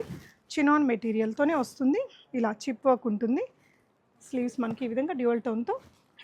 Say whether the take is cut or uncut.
uncut